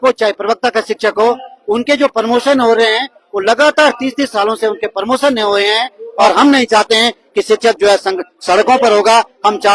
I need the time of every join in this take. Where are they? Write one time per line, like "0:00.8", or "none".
0:06.3